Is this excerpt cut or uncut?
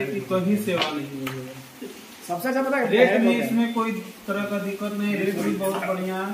uncut